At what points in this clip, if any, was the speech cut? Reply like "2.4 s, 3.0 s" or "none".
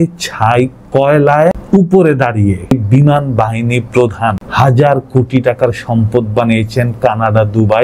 1.6 s, 2.7 s, 4.4 s

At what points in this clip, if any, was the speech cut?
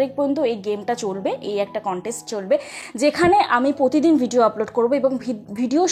none

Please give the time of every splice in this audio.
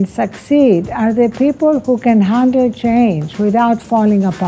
none

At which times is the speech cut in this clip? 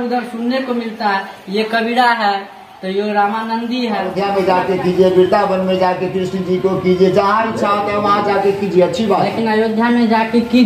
4.1 s

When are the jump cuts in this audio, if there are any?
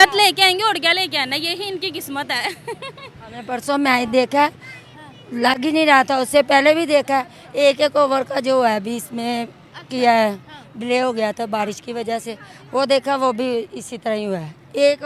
none

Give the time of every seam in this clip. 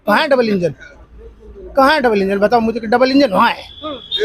none

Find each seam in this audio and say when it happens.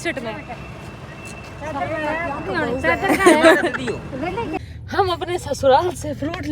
4.6 s

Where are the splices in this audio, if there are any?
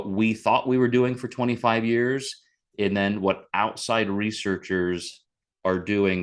none

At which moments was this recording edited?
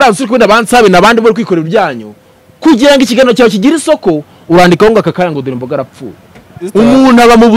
6.6 s

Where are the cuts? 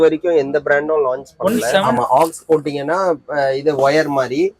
1.9 s

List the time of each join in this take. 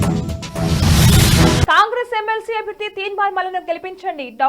1.2 s

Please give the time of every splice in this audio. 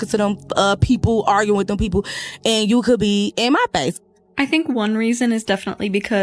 3.9 s

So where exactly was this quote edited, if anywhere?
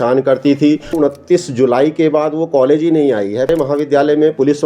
0.9 s, 3.5 s

